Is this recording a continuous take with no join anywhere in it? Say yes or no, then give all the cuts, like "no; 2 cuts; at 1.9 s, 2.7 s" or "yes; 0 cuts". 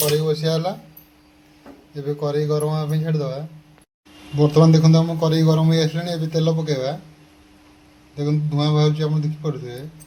yes; 0 cuts